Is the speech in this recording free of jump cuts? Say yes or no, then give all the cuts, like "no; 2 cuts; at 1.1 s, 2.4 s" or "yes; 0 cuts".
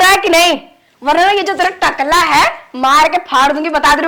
yes; 0 cuts